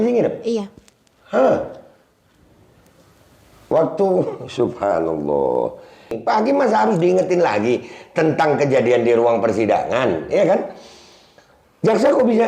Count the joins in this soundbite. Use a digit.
1